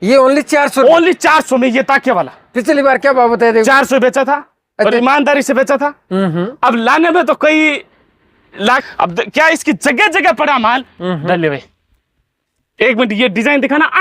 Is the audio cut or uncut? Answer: cut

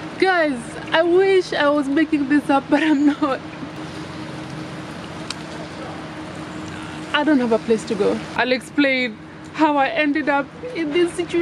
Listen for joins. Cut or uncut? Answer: cut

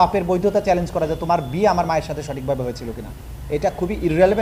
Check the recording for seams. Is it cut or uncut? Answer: uncut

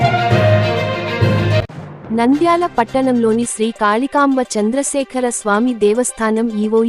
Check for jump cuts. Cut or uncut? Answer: uncut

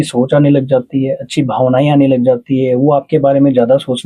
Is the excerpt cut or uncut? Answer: uncut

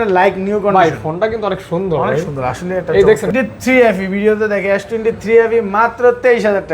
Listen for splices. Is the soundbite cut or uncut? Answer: cut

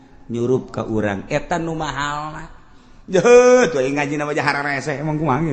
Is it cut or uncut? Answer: uncut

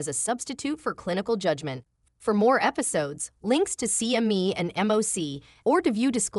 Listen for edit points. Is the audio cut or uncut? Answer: uncut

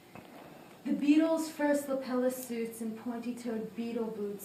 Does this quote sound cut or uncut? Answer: uncut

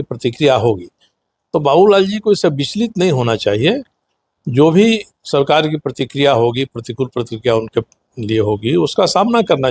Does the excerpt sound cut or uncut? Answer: uncut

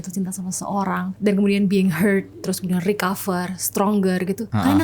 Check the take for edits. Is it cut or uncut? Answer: cut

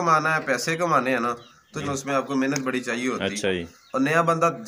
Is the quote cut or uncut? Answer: cut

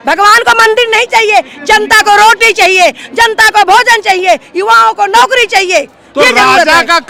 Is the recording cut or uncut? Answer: uncut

